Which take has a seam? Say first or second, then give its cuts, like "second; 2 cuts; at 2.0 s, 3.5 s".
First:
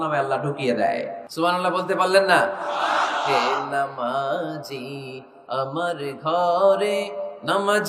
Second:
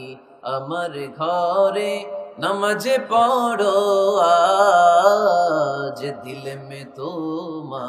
first; 1 cut; at 1.2 s